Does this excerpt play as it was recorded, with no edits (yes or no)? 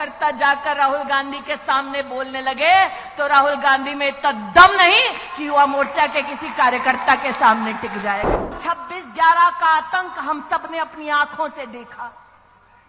no